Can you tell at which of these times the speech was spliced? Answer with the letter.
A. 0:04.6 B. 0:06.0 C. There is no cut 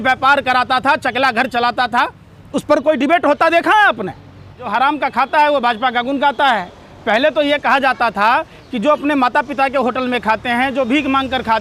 A